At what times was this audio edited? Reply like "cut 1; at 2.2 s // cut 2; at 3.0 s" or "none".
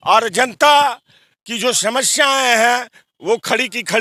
none